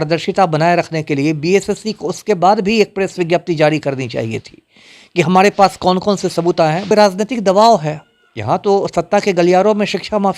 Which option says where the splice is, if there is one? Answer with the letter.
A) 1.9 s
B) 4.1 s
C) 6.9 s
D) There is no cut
C